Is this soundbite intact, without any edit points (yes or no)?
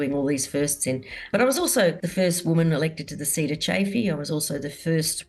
no